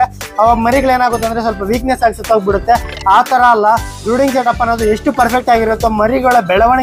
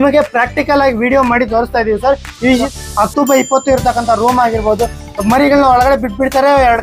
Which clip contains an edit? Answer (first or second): second